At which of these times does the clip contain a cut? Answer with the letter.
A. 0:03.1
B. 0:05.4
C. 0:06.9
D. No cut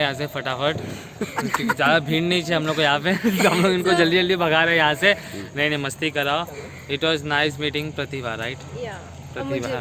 D